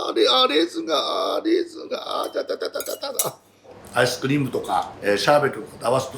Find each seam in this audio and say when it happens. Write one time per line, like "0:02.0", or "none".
0:03.8
0:04.9